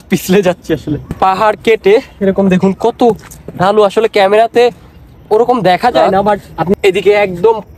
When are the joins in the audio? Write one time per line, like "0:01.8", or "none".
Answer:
0:01.2
0:06.7